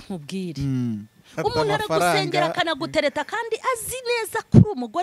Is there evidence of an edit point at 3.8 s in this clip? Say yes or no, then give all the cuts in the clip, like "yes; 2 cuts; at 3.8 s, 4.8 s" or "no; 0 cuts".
no; 1 cut; at 1.2 s